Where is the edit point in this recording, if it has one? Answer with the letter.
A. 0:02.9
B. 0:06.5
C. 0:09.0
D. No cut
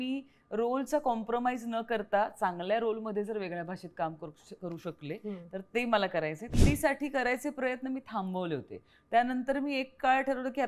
B